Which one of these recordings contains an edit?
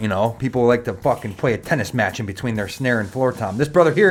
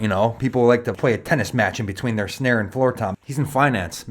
second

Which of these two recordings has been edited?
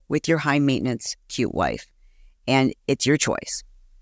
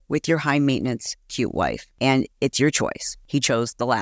second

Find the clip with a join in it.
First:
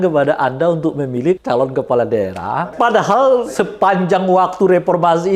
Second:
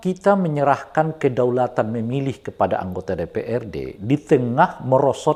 first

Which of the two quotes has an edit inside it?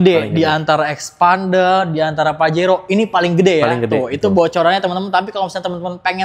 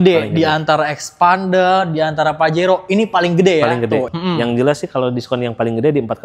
second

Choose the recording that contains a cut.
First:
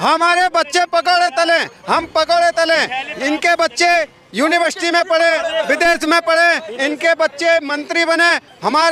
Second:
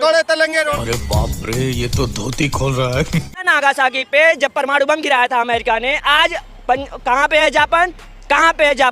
second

